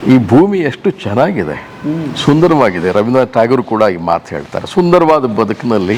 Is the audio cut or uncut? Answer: uncut